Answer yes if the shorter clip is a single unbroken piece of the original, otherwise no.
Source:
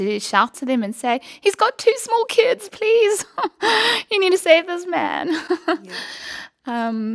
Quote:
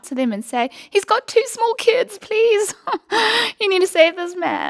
yes